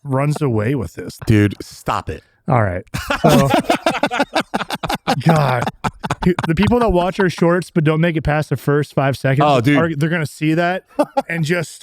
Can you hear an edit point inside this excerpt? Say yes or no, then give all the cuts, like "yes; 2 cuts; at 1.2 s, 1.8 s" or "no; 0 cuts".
yes; 1 cut; at 1.1 s